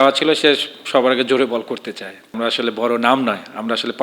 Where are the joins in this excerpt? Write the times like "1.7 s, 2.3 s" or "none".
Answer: 2.3 s